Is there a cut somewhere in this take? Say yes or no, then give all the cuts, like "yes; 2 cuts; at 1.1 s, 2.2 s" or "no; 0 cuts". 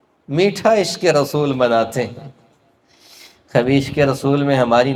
no; 0 cuts